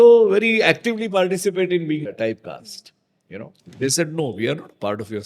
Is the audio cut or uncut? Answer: cut